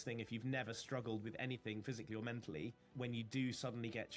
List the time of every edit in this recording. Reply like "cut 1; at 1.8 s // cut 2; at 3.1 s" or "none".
cut 1; at 2.8 s